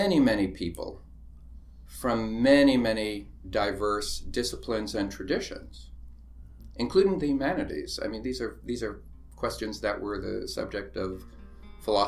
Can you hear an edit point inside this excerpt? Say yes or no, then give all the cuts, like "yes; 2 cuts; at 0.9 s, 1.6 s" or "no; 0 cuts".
no; 0 cuts